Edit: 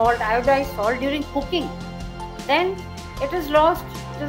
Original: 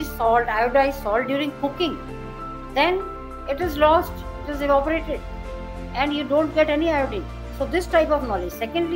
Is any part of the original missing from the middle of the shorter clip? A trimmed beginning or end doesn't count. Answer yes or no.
no